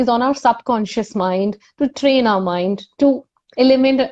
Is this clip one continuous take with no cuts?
no; 1 cut; at 1.2 s

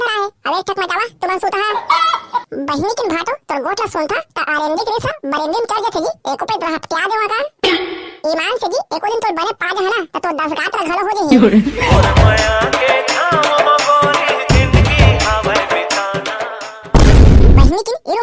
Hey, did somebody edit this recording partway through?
yes; 1 cut; at 11.9 s

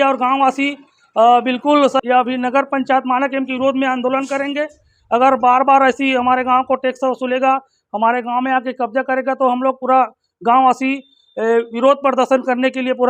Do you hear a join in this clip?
yes; 1 cut; at 2.0 s

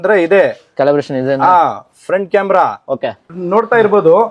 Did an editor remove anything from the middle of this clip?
yes; 1 cut; at 3.4 s

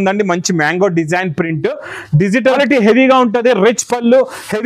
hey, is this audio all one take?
no; 1 cut; at 2.6 s

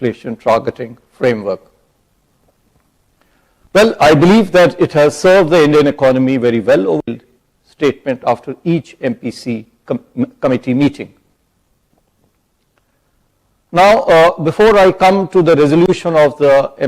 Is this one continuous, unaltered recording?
no; 1 cut; at 7.0 s

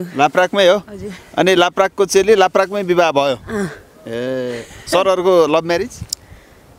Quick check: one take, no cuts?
yes; 0 cuts

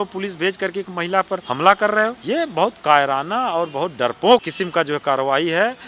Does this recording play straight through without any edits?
no; 3 cuts; at 1.4 s, 2.2 s, 4.5 s

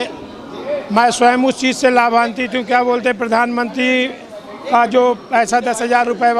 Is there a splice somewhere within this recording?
no; 0 cuts

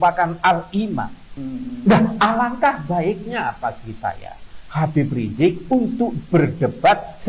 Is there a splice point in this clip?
no; 0 cuts

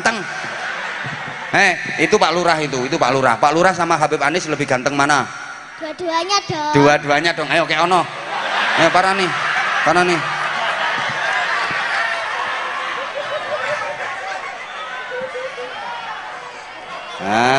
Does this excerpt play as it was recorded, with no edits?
yes; 0 cuts

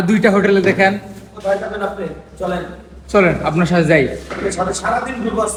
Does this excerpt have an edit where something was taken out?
no; 0 cuts

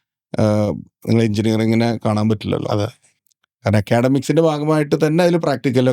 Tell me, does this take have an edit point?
no; 0 cuts

